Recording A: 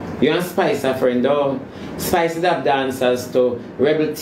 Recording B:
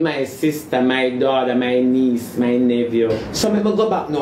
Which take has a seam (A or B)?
B